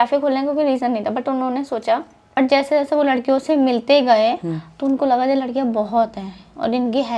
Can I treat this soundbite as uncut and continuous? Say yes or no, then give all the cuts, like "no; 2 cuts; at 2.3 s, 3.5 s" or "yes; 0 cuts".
no; 1 cut; at 2.4 s